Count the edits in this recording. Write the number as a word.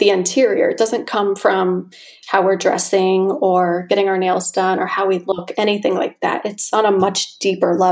zero